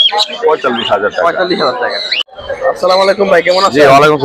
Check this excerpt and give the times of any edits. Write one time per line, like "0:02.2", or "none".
0:02.1